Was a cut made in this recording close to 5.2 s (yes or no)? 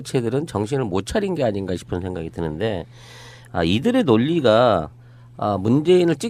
no